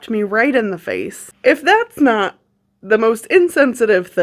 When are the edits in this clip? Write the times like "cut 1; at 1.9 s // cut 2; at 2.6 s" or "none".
cut 1; at 1.2 s

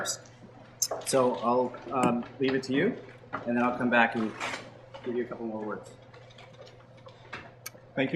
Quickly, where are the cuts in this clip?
cut 1; at 2.2 s

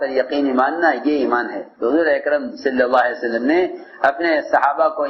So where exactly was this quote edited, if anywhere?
cut 1; at 1.6 s

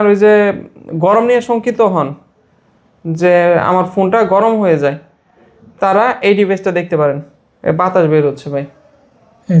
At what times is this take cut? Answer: none

